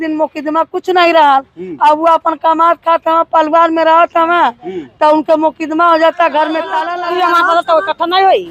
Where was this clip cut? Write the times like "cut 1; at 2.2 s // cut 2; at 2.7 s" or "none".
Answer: cut 1; at 6.8 s

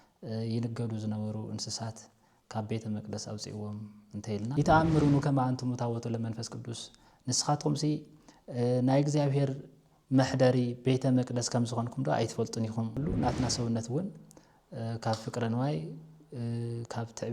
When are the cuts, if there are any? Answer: cut 1; at 4.5 s // cut 2; at 13.0 s

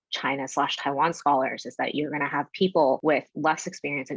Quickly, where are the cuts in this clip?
cut 1; at 3.0 s

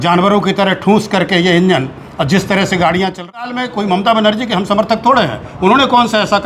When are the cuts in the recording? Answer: cut 1; at 3.4 s

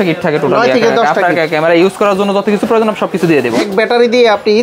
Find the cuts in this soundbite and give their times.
cut 1; at 3.6 s

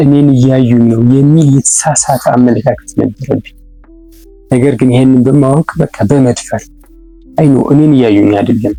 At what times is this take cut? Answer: none

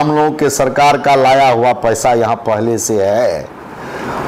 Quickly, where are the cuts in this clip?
none

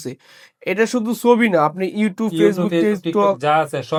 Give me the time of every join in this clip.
none

